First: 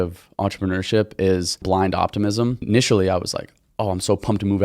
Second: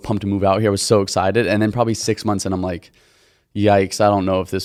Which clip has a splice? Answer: first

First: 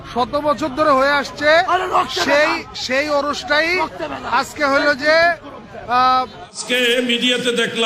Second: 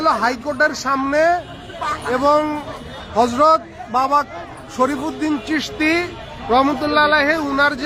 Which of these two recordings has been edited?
first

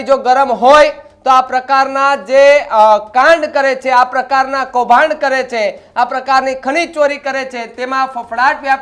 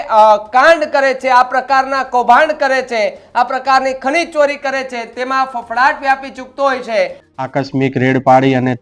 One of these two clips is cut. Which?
second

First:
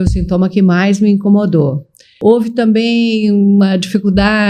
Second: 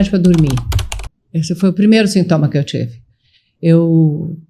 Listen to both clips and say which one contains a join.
first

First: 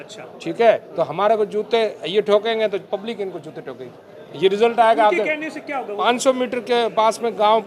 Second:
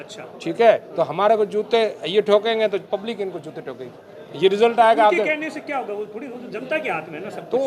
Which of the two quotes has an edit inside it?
first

